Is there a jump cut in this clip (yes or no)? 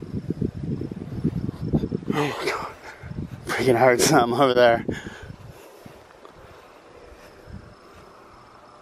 yes